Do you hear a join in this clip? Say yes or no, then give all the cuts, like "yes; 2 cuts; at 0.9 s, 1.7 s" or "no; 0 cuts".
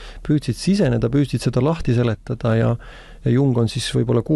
no; 0 cuts